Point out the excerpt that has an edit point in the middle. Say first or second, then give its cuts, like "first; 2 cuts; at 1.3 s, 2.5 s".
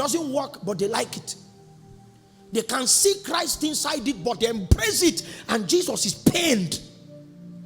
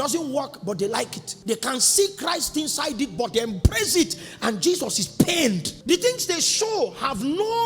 second; 2 cuts; at 1.3 s, 5.7 s